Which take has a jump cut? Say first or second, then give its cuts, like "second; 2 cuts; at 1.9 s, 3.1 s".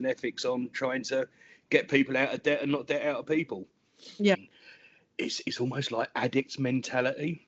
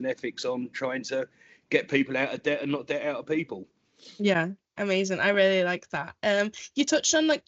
first; 1 cut; at 4.4 s